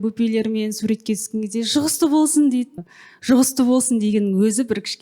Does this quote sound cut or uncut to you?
cut